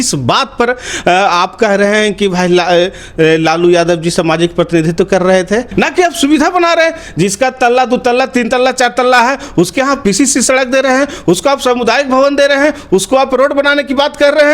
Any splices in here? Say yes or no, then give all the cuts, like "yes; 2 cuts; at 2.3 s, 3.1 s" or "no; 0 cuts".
yes; 1 cut; at 5.5 s